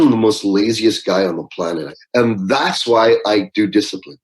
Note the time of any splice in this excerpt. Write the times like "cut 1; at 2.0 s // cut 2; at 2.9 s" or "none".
cut 1; at 2.0 s